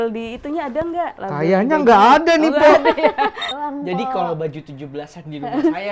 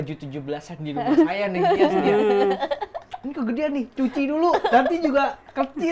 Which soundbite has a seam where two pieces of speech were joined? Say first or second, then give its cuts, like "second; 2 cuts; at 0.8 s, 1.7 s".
first; 2 cuts; at 1.2 s, 3.4 s